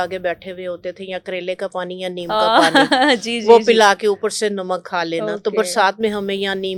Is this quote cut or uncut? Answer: uncut